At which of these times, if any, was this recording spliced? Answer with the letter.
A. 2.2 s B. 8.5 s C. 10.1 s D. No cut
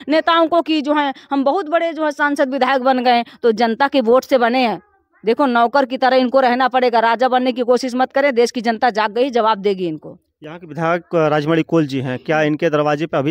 D